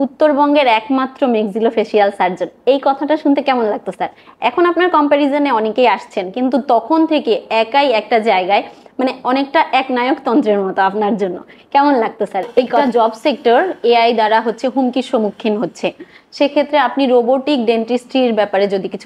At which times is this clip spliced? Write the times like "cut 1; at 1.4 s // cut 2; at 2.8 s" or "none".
cut 1; at 12.7 s

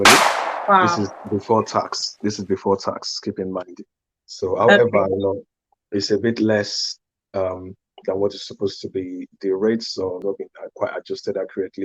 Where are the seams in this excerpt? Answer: cut 1; at 10.2 s

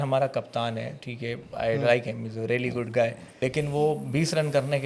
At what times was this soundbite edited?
cut 1; at 3.2 s

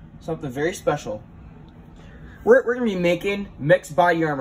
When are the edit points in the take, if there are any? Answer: none

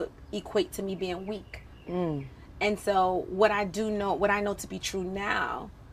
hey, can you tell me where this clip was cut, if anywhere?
cut 1; at 4.4 s

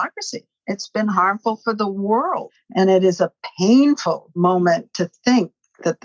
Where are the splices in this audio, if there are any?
cut 1; at 2.6 s // cut 2; at 4.4 s

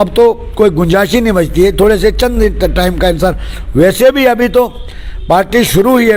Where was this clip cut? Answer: none

